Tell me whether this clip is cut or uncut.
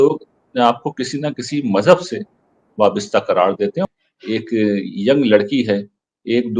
cut